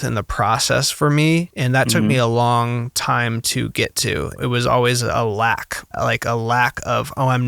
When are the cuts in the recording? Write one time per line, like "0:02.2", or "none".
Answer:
0:01.6
0:04.3
0:05.9